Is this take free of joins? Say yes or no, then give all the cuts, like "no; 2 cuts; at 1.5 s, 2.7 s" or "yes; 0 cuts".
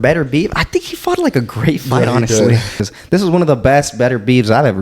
no; 1 cut; at 2.8 s